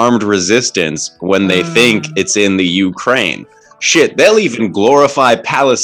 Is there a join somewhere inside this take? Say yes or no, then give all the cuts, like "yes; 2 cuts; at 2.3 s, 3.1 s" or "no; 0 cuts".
no; 0 cuts